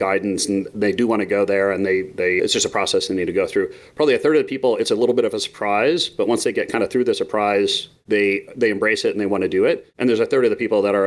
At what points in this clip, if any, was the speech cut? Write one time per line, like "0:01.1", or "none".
0:07.9
0:09.9